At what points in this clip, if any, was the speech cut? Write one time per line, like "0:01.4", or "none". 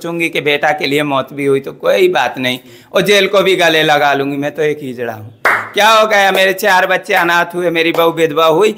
none